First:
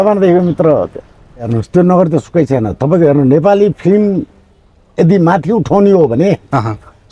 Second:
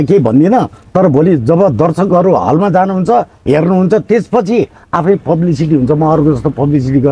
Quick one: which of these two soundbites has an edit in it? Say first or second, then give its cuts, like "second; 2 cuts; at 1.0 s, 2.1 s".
first; 1 cut; at 1.5 s